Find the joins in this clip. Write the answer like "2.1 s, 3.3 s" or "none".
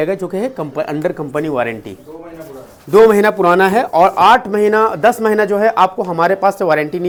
none